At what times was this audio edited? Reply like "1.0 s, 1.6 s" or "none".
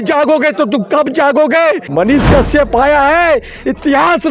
1.9 s

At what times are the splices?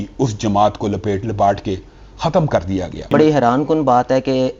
3.1 s

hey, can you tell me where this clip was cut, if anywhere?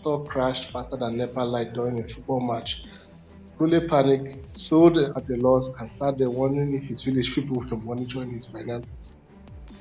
none

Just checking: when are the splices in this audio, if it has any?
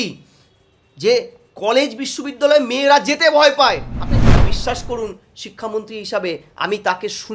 4.3 s

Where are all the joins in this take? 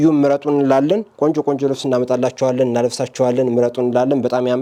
none

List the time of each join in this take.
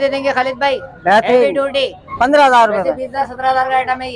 2.0 s

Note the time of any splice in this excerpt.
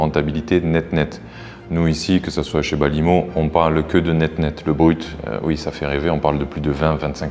none

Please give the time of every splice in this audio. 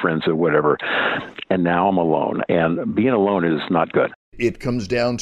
4.2 s

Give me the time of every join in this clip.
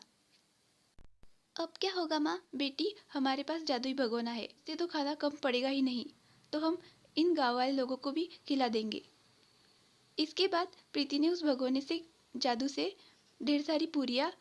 2.5 s, 4.7 s

